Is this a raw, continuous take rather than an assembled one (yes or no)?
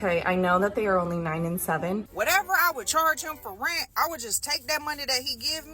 no